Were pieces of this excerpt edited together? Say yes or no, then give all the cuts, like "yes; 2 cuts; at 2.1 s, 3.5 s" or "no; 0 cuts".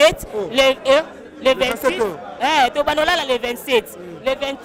no; 0 cuts